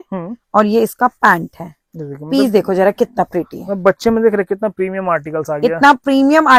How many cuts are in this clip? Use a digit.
0